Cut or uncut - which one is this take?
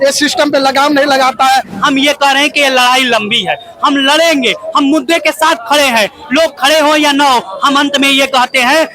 cut